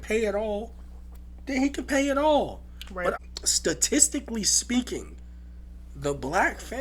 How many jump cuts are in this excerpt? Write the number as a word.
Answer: one